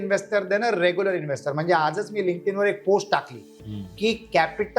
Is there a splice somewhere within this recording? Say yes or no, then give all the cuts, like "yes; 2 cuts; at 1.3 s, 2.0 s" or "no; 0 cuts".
no; 0 cuts